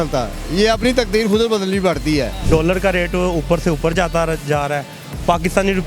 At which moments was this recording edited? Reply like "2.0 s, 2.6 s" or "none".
2.4 s